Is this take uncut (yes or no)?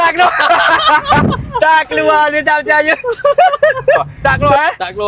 no